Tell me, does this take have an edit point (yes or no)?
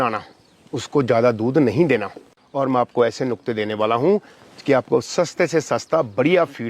yes